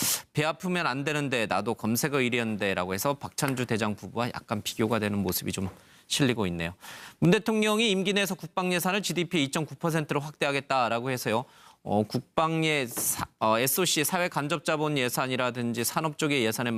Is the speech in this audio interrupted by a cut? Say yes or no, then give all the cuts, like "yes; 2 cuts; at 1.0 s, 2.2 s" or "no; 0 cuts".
no; 0 cuts